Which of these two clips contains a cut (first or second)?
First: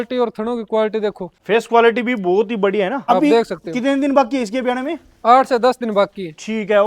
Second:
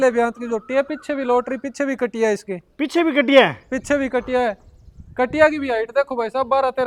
first